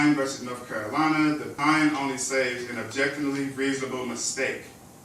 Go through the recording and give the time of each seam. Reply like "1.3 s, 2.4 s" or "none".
1.5 s